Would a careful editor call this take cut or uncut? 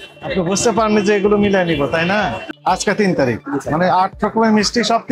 cut